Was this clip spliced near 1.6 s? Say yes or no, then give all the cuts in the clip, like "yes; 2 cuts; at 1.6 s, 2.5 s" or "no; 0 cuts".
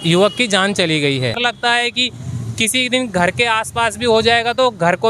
yes; 1 cut; at 1.6 s